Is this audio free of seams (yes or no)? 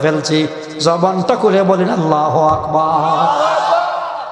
yes